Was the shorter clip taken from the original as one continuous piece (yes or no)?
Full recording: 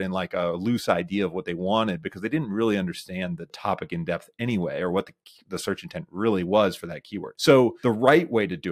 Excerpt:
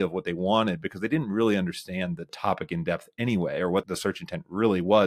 no